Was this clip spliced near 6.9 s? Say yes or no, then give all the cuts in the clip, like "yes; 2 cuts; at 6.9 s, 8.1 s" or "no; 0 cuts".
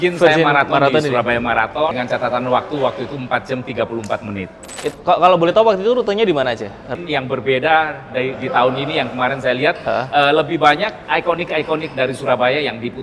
yes; 4 cuts; at 1.9 s, 4.8 s, 6.9 s, 11.0 s